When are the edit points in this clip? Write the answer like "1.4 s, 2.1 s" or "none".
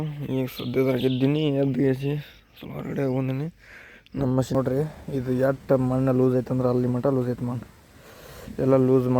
4.5 s